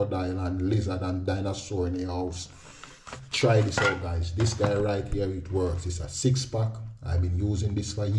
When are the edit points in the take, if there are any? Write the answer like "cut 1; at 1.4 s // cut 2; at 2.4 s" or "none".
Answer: none